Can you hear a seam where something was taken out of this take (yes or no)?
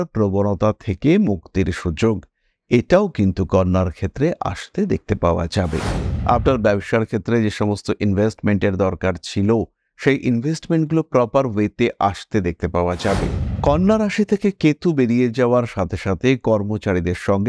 yes